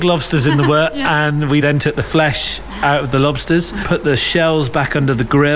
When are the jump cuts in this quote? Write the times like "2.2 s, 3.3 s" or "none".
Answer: 1.4 s, 3.8 s

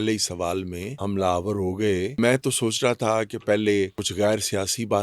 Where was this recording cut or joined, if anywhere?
0.9 s, 2.2 s, 4.0 s

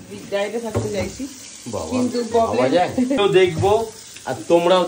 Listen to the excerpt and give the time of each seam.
3.2 s

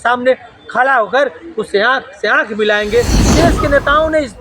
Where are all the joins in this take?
3.3 s

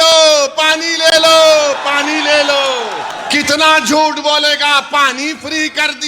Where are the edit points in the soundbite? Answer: 3.1 s

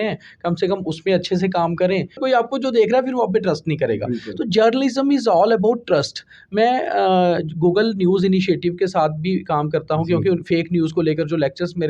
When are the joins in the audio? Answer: 2.2 s

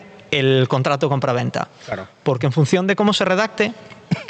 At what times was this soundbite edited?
none

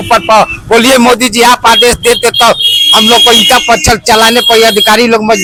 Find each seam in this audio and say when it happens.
none

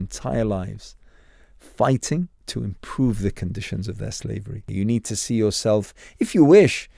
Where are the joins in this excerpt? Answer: 2.4 s, 4.7 s

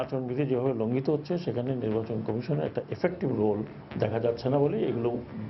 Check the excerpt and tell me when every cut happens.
3.8 s

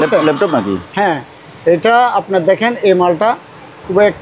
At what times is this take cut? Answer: none

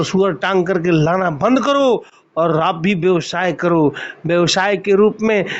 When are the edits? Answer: none

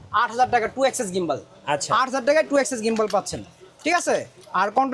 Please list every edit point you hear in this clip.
none

